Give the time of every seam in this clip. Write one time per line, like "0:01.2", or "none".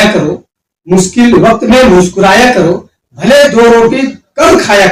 none